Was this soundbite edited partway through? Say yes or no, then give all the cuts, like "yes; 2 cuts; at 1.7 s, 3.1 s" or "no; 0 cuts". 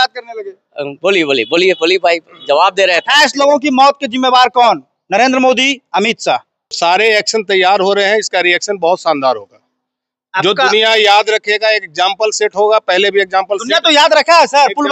yes; 1 cut; at 6.8 s